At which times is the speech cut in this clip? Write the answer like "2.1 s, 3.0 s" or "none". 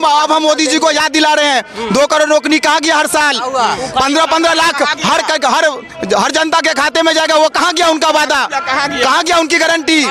none